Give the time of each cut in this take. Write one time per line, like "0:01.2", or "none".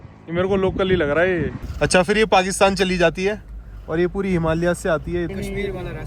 0:01.6
0:05.3